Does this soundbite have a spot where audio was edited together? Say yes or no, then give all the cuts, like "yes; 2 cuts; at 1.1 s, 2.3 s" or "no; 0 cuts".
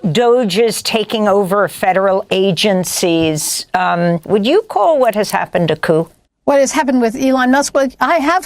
yes; 2 cuts; at 4.2 s, 6.2 s